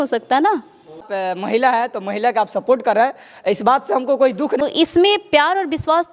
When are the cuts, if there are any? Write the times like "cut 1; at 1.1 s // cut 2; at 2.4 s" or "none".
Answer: cut 1; at 1.1 s // cut 2; at 4.6 s